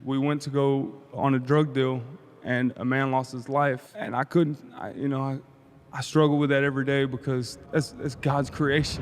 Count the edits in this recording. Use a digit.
3